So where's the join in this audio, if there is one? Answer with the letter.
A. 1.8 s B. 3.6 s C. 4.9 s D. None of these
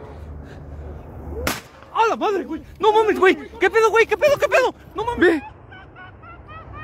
C